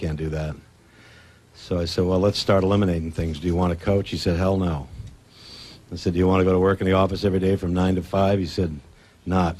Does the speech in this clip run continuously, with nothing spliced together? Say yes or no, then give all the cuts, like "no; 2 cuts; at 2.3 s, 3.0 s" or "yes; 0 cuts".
no; 1 cut; at 8.0 s